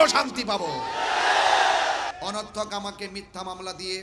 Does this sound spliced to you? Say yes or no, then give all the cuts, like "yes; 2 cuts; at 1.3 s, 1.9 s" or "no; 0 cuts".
yes; 1 cut; at 2.2 s